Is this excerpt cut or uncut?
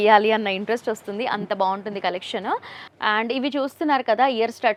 uncut